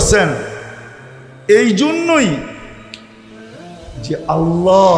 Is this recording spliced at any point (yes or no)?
no